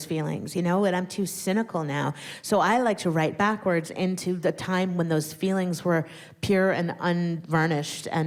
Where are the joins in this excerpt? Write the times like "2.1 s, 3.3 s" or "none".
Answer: none